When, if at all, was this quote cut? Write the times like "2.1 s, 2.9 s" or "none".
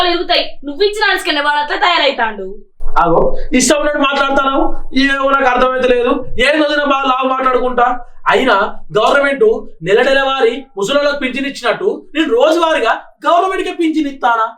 none